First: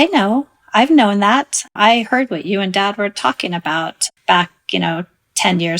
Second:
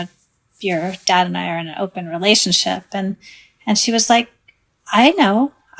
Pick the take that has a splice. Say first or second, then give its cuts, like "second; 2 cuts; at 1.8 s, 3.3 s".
first; 2 cuts; at 1.7 s, 4.0 s